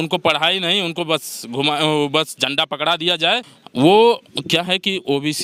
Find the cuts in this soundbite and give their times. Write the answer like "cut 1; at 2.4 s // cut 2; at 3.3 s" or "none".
none